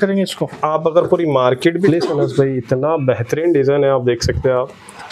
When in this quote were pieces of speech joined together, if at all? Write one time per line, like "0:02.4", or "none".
0:01.9